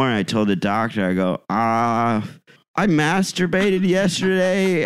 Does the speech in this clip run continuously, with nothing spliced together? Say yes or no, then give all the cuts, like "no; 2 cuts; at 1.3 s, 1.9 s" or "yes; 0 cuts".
yes; 0 cuts